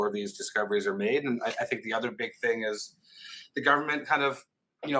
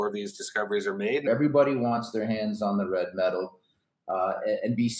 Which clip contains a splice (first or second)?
second